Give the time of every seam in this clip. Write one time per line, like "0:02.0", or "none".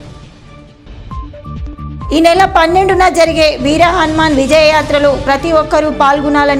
0:01.7